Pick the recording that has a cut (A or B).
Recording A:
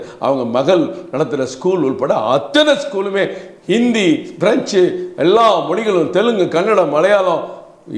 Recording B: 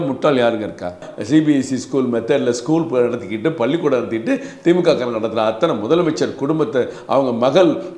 B